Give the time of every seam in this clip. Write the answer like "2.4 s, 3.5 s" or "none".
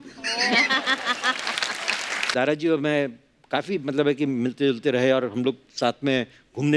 2.3 s